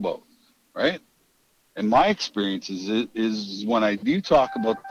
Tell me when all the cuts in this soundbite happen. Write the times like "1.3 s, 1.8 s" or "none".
none